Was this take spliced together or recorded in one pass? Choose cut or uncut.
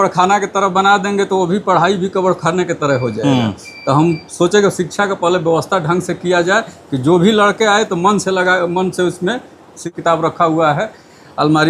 cut